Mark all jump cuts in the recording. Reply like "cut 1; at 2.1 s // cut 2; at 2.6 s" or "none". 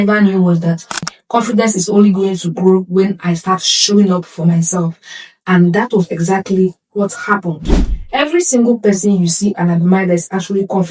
cut 1; at 1.1 s // cut 2; at 7.6 s